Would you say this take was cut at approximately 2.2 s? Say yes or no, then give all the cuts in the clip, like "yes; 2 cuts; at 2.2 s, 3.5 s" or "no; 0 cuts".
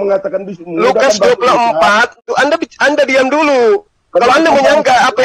yes; 1 cut; at 2.2 s